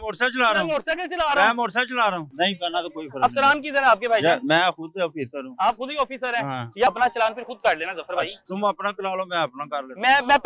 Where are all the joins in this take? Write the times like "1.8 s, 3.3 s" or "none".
2.3 s, 6.9 s